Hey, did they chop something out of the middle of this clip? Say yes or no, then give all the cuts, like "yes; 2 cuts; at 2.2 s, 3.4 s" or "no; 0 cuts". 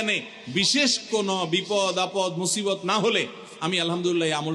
no; 0 cuts